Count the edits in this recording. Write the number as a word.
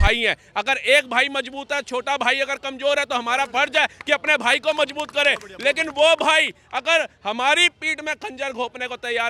zero